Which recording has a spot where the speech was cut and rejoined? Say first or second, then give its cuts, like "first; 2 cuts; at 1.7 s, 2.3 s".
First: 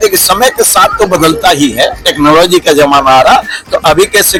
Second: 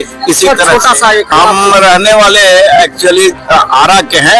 second; 1 cut; at 1.3 s